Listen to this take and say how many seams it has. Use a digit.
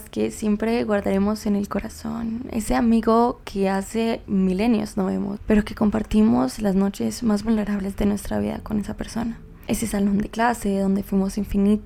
0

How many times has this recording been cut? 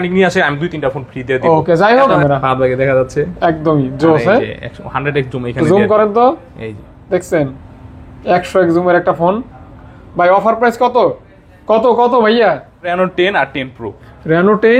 2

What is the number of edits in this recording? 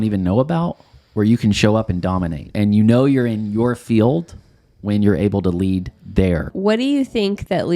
2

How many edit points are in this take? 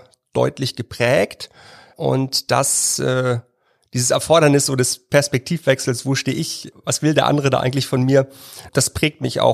3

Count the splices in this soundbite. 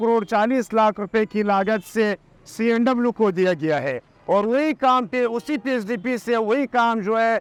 0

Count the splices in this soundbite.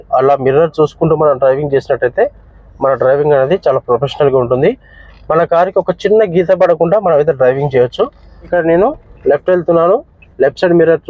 1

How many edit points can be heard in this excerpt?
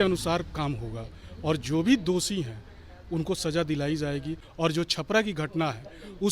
1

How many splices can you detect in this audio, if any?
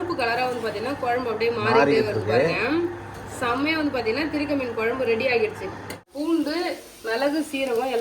1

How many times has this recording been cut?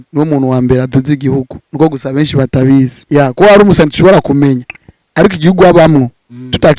1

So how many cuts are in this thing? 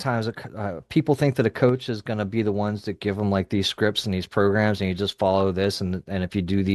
0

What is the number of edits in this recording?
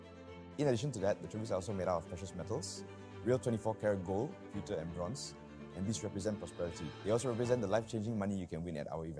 1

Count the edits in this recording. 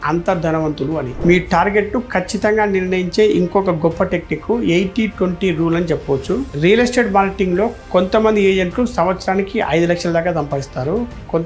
2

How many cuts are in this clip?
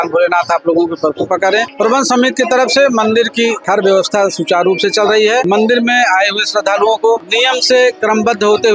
4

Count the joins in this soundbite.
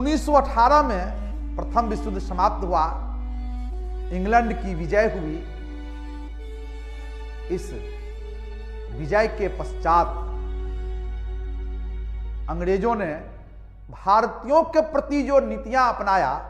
0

